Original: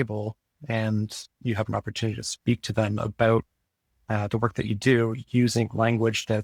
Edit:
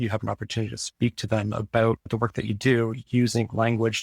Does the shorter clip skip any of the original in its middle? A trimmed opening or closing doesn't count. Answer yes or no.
yes